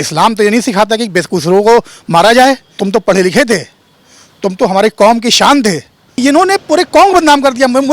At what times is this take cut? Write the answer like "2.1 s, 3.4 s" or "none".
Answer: 2.7 s, 6.2 s